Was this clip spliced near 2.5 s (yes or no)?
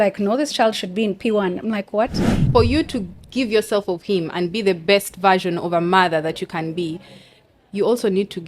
yes